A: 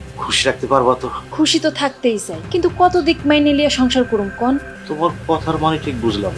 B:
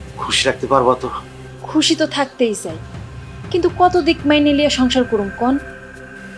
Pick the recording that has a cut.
A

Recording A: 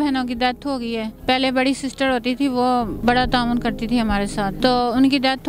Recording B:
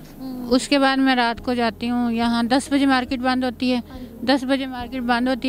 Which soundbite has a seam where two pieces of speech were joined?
A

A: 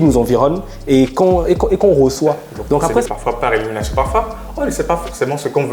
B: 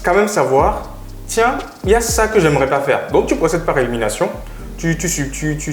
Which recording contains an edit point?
A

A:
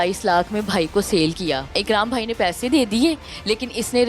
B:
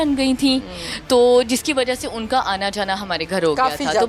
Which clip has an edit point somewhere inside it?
A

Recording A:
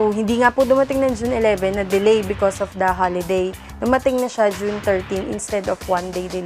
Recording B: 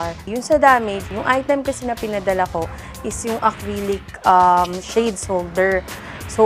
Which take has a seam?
B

